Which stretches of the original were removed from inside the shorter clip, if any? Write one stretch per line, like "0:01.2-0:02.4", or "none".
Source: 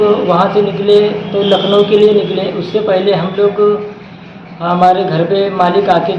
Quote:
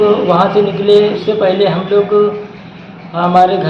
0:01.2-0:02.6